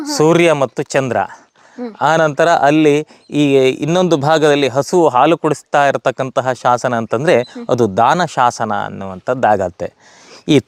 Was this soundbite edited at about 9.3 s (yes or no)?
no